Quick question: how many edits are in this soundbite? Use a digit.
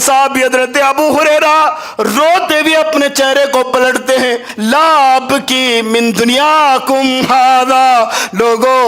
1